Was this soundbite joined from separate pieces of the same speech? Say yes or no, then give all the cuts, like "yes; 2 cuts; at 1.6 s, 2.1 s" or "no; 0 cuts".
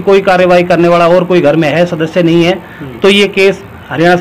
no; 0 cuts